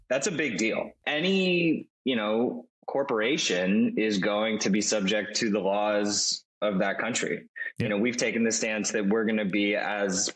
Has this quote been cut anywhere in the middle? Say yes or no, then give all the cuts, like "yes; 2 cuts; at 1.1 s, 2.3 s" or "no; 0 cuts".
yes; 1 cut; at 1.0 s